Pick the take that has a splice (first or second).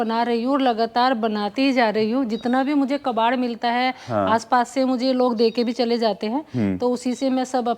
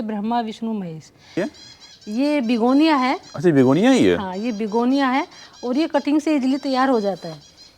second